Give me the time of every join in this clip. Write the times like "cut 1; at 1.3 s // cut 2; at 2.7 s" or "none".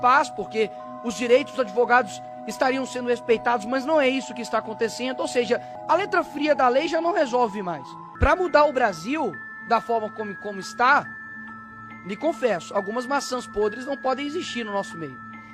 cut 1; at 5.7 s // cut 2; at 8.1 s